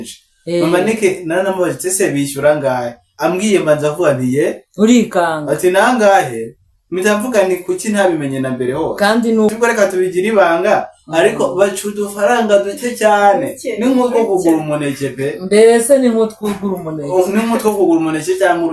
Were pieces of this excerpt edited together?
yes; 1 cut; at 9.6 s

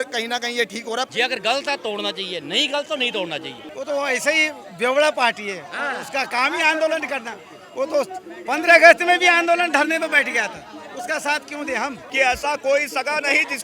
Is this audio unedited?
no; 3 cuts; at 1.1 s, 3.6 s, 12.0 s

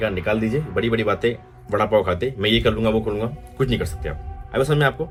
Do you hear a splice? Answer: no; 0 cuts

